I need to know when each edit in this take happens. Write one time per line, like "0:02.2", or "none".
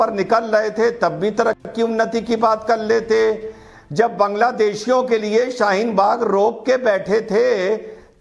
none